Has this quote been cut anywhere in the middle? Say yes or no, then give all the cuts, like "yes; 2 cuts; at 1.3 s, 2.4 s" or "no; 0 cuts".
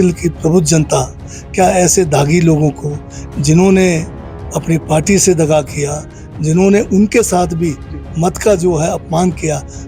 no; 0 cuts